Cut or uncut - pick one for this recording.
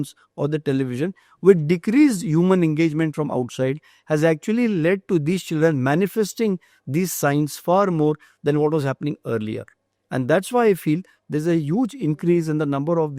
uncut